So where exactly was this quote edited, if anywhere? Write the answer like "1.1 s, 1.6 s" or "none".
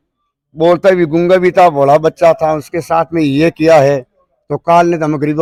none